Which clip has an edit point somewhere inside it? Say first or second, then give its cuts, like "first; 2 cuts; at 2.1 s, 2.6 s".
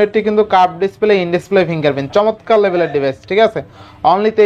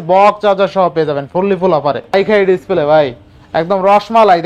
second; 1 cut; at 2.1 s